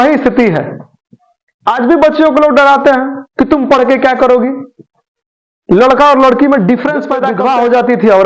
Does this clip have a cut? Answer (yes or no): yes